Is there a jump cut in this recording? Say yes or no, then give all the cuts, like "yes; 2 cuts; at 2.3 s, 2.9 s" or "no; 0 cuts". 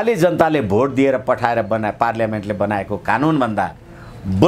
no; 0 cuts